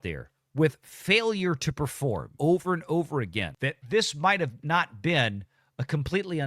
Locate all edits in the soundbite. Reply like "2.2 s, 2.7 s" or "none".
2.3 s